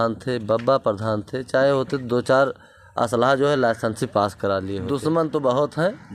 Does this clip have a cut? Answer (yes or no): yes